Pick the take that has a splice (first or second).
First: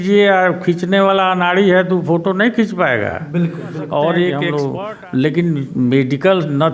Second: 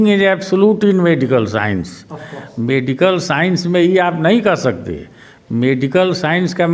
first